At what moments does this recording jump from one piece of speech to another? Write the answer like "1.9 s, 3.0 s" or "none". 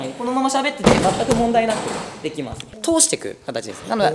2.6 s